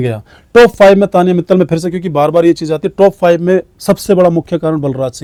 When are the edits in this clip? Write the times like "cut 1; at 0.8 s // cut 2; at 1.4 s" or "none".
none